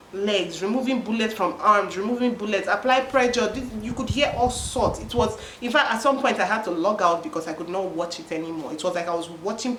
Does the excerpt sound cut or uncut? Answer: uncut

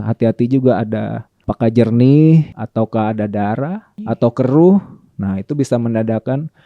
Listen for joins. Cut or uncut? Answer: cut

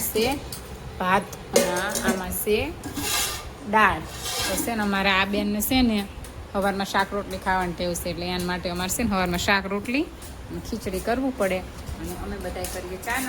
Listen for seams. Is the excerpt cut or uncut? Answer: cut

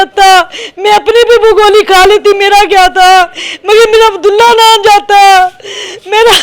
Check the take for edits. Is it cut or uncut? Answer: uncut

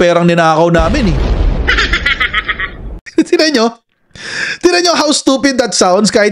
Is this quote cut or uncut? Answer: uncut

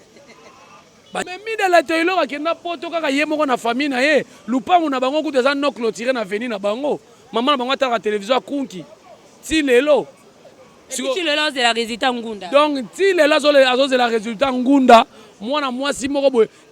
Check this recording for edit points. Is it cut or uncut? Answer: cut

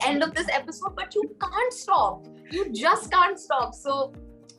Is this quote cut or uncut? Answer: uncut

